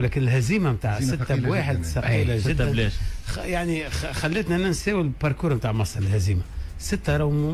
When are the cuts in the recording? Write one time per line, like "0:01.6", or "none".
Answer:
none